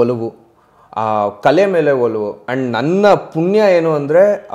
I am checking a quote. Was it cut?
yes; 1 cut; at 2.5 s

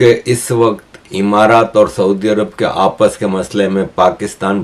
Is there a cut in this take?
no; 0 cuts

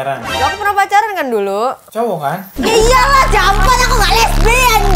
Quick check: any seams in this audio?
yes; 1 cut; at 1.8 s

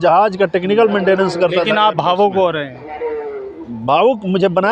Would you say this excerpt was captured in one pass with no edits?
yes; 0 cuts

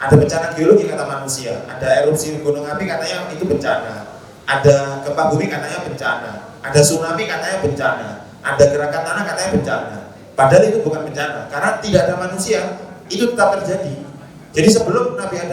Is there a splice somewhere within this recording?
no; 0 cuts

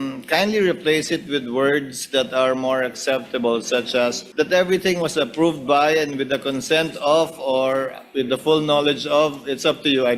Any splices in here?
yes; 1 cut; at 4.2 s

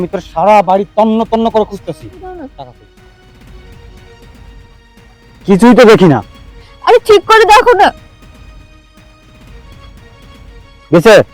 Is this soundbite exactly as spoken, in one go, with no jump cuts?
no; 1 cut; at 2.5 s

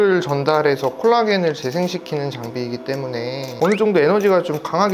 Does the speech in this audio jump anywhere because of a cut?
yes; 1 cut; at 3.5 s

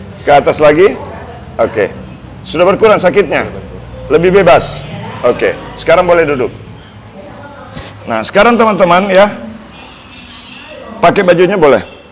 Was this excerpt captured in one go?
yes; 0 cuts

